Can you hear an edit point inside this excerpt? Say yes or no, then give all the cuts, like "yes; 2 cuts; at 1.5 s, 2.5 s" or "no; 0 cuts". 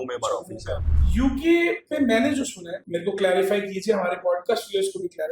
yes; 2 cuts; at 0.9 s, 2.7 s